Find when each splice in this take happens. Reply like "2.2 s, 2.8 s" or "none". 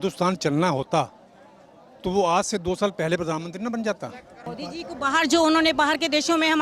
4.4 s